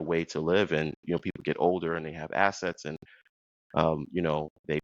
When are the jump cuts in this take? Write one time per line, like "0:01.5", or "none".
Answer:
none